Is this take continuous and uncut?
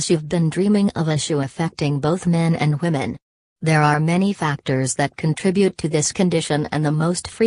yes; 0 cuts

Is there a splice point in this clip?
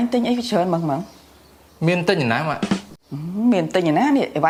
no; 0 cuts

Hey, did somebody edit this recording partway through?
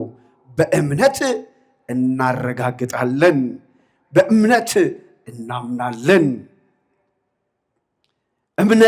no; 0 cuts

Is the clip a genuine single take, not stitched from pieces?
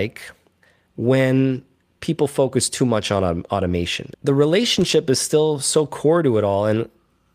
no; 1 cut; at 4.0 s

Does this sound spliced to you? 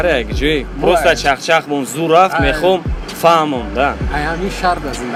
no; 0 cuts

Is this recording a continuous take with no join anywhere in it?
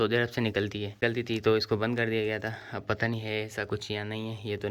no; 1 cut; at 1.0 s

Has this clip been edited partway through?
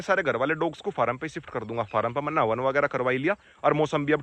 no; 0 cuts

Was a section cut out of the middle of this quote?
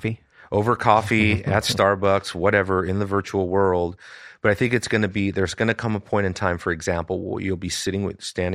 no; 0 cuts

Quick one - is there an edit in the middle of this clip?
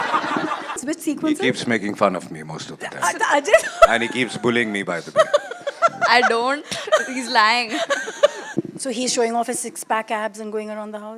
yes; 2 cuts; at 0.8 s, 8.4 s

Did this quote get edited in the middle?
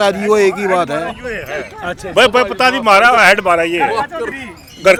no; 0 cuts

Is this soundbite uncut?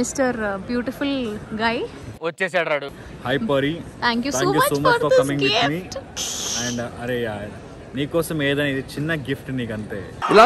yes; 0 cuts

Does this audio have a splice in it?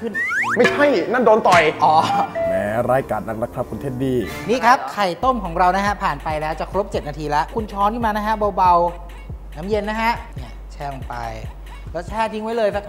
no; 0 cuts

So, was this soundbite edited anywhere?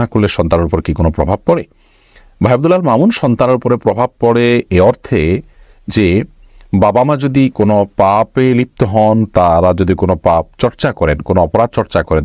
no; 0 cuts

